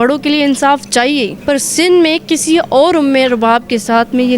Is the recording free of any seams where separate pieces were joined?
no; 1 cut; at 1.3 s

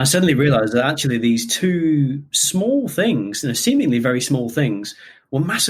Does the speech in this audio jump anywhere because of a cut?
no; 0 cuts

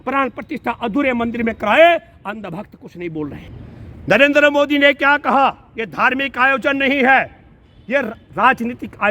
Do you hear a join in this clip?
yes; 1 cut; at 3.5 s

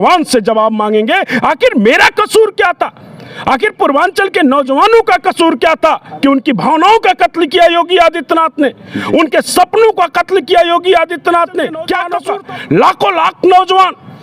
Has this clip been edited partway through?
yes; 1 cut; at 12.1 s

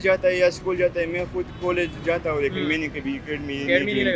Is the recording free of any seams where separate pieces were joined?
yes; 0 cuts

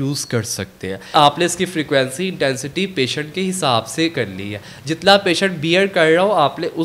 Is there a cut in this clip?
yes; 1 cut; at 1.1 s

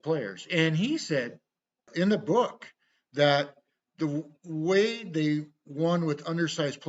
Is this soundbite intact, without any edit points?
no; 1 cut; at 1.9 s

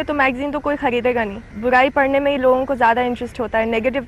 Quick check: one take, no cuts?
no; 1 cut; at 1.4 s

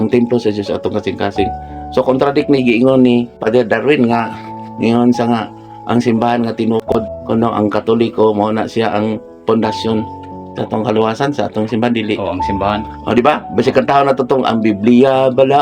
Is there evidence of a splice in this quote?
yes; 2 cuts; at 3.4 s, 7.1 s

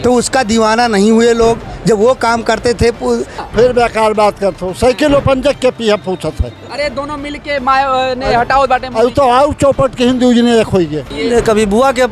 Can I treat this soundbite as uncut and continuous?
no; 2 cuts; at 3.4 s, 11.1 s

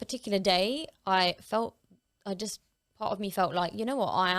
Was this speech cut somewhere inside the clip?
no; 0 cuts

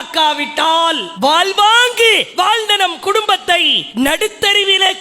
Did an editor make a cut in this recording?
yes; 3 cuts; at 1.1 s, 2.3 s, 3.8 s

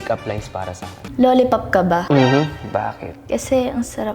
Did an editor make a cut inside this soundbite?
yes; 1 cut; at 1.1 s

